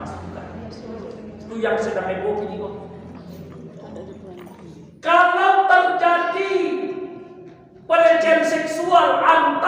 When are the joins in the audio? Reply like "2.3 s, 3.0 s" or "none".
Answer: 4.2 s